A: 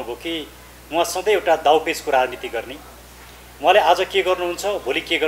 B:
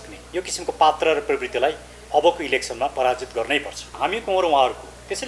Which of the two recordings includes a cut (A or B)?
B